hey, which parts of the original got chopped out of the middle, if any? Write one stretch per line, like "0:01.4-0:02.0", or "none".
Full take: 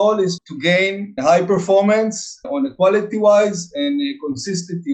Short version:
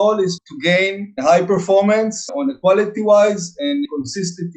0:02.2-0:02.4
0:04.0-0:04.2